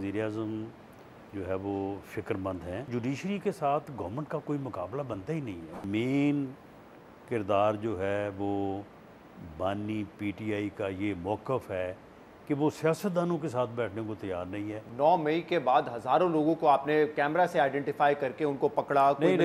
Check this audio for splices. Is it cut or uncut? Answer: cut